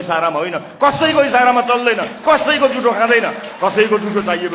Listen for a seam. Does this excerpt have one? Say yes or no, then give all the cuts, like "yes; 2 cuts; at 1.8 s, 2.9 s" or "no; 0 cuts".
yes; 1 cut; at 3.4 s